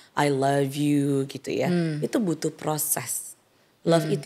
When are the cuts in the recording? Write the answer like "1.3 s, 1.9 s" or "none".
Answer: none